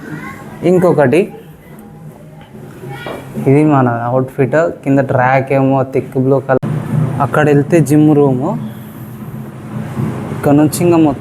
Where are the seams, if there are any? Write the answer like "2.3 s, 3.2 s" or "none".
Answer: 6.6 s

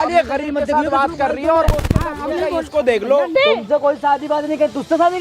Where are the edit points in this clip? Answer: 3.3 s

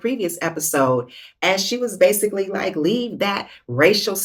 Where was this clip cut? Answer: none

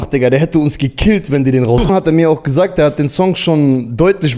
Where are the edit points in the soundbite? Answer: 1.9 s

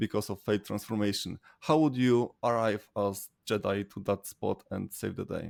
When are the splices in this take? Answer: none

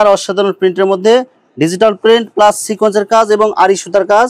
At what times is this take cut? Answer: none

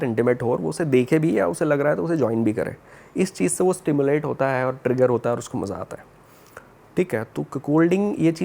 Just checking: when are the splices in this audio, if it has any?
none

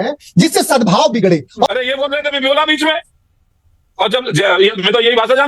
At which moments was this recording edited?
1.7 s

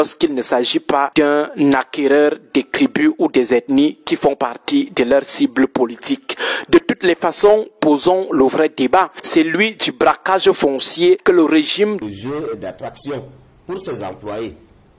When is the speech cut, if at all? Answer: 12.0 s

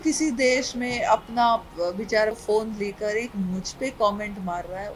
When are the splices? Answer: 2.4 s

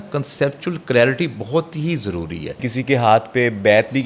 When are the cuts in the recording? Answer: 2.7 s

